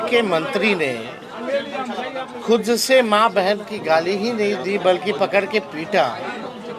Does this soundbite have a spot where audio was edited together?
no; 0 cuts

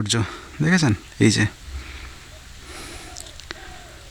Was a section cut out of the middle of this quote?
no; 0 cuts

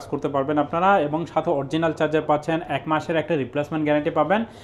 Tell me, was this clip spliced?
no; 0 cuts

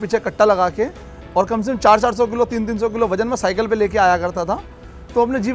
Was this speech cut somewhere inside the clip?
no; 0 cuts

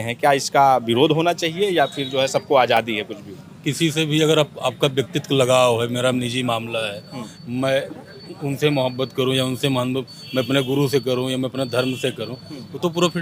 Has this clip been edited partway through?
no; 0 cuts

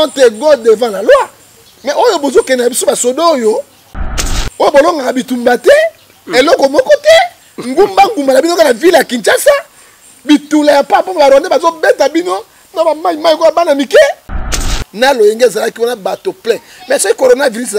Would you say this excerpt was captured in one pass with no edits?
no; 1 cut; at 14.7 s

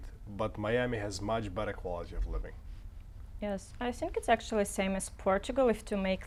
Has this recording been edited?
no; 0 cuts

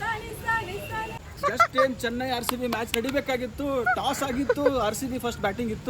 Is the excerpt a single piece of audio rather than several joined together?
no; 1 cut; at 1.2 s

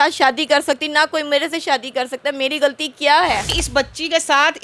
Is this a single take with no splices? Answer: no; 1 cut; at 3.6 s

